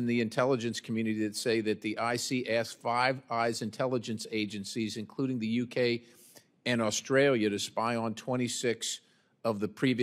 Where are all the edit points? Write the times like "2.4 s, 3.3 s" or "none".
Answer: none